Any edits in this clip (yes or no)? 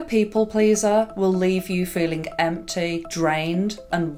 no